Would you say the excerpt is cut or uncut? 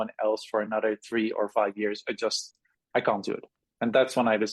uncut